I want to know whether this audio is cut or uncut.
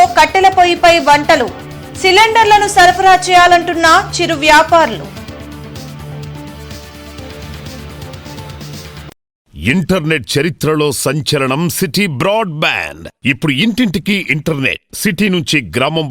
cut